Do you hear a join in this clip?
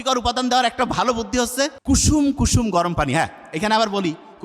yes; 1 cut; at 1.8 s

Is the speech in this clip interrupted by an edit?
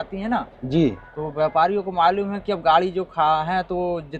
no; 0 cuts

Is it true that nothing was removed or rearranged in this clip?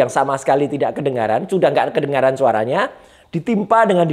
yes; 0 cuts

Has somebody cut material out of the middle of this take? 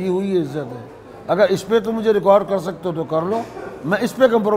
no; 0 cuts

